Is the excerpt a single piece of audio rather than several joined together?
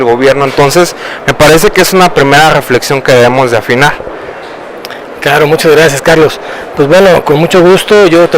no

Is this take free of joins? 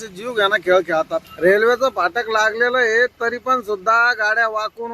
no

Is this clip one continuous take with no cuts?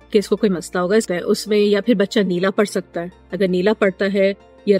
no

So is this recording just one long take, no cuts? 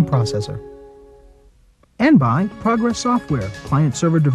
no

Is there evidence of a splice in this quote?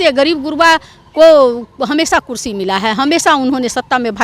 no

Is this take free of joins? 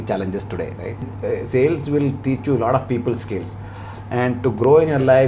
no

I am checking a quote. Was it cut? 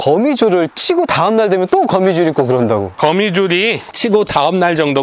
no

